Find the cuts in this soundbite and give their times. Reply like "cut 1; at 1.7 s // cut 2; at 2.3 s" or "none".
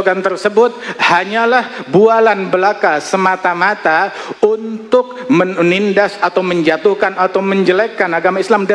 none